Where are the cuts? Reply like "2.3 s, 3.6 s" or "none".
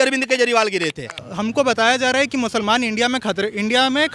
1.3 s